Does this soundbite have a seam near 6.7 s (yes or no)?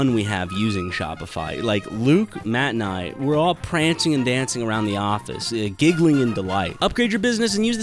yes